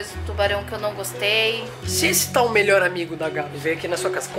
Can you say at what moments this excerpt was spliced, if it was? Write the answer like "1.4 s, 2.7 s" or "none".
1.8 s, 3.5 s